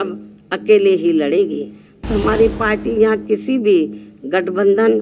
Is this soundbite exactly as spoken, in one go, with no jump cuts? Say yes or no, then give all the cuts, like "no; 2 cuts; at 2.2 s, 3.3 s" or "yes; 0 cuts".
no; 1 cut; at 2.0 s